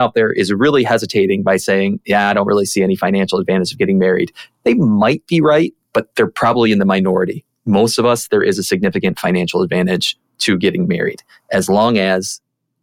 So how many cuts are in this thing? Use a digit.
0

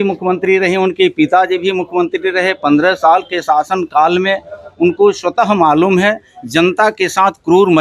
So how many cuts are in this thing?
0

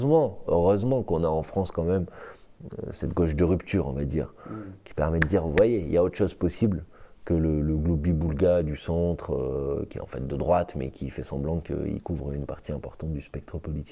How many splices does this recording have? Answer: 0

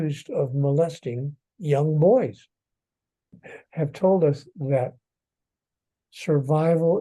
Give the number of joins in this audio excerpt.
1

